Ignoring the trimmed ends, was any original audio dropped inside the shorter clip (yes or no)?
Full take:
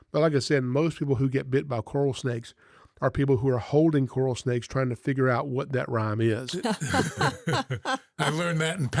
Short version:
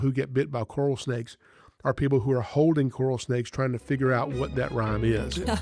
no